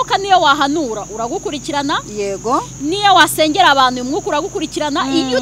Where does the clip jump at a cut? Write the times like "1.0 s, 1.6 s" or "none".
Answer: none